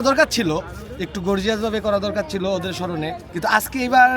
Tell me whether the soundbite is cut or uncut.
cut